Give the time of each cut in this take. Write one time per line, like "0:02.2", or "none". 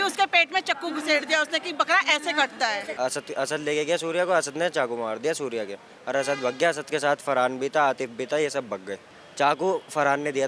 0:02.9
0:09.2